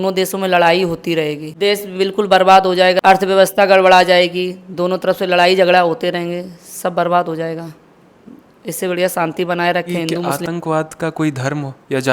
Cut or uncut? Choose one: cut